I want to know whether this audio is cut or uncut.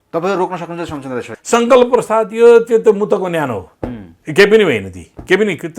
cut